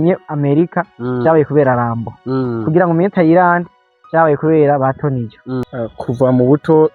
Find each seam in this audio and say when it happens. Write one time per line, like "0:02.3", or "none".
0:05.6